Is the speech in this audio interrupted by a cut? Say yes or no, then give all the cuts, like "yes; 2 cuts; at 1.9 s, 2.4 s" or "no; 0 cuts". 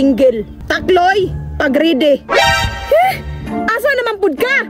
no; 0 cuts